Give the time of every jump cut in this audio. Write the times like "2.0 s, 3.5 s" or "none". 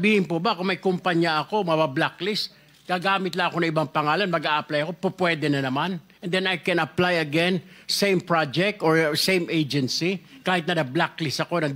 none